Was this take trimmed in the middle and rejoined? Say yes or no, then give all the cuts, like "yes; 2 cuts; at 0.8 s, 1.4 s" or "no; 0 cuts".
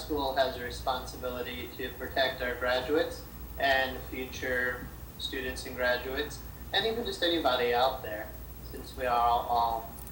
no; 0 cuts